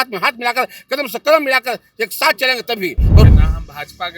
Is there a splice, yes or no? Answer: yes